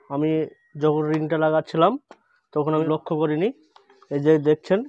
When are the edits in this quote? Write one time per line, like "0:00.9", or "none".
0:02.9